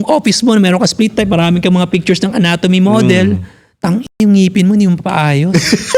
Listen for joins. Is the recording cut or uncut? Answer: uncut